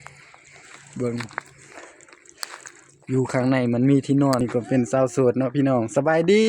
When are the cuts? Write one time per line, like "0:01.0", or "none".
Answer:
0:04.4